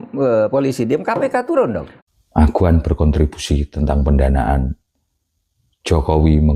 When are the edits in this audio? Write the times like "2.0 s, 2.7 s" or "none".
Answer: 1.9 s